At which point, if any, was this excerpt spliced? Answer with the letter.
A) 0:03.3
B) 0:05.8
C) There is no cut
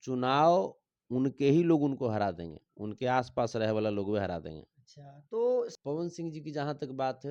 B